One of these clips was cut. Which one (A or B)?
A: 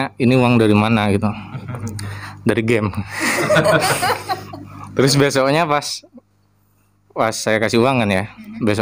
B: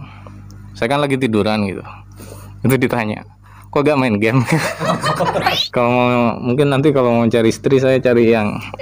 B